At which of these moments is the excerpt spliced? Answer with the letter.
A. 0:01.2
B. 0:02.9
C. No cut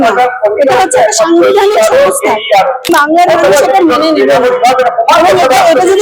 B